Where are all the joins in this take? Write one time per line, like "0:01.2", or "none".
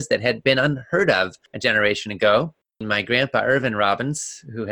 0:01.4
0:02.9